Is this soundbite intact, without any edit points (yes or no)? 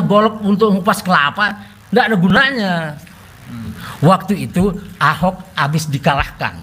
no